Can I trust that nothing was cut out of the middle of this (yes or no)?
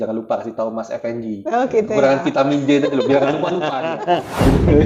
yes